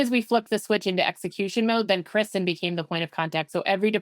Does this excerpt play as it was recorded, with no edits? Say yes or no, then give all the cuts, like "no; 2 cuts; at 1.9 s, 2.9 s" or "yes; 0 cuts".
yes; 0 cuts